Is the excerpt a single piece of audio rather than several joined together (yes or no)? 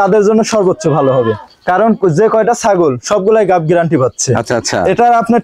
yes